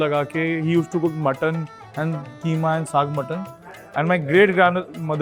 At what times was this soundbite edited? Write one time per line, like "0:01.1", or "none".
none